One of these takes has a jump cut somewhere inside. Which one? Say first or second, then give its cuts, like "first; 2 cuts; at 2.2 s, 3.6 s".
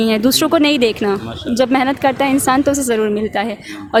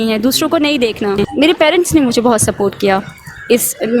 second; 1 cut; at 1.2 s